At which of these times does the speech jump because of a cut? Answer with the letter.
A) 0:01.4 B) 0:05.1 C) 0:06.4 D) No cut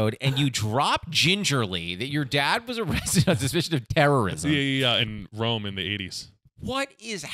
B